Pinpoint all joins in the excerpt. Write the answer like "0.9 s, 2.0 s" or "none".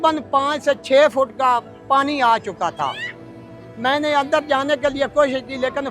none

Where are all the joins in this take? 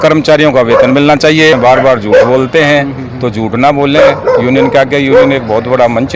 1.6 s

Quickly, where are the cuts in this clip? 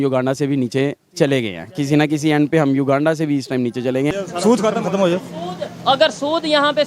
4.1 s

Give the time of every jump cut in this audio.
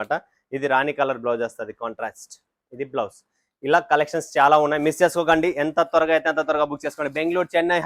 none

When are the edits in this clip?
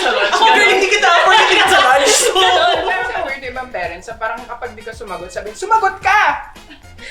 3.0 s

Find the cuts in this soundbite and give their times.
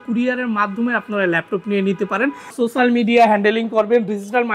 2.5 s

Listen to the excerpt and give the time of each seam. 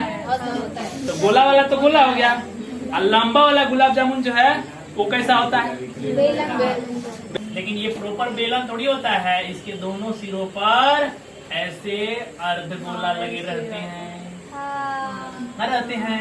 7.3 s

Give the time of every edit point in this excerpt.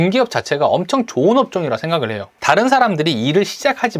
2.3 s

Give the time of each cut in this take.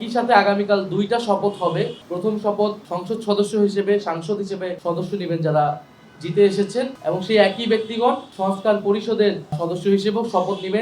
2.0 s, 2.9 s, 4.7 s, 7.0 s, 8.3 s, 9.6 s

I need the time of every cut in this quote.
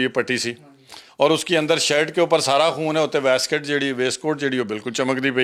none

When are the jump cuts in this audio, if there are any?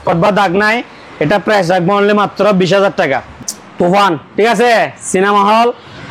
3.3 s

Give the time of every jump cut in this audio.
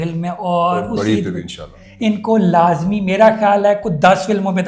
1.8 s

